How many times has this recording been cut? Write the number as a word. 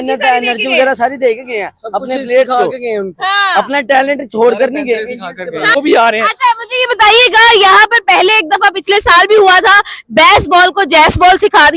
zero